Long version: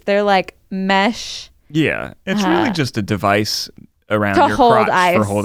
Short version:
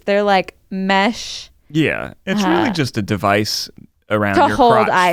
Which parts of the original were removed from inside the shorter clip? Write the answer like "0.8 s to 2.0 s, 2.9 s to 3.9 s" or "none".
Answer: none